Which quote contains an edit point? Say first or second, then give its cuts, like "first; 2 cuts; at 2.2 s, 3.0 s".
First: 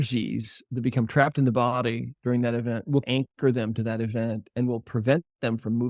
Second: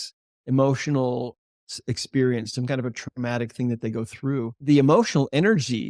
second; 1 cut; at 4.5 s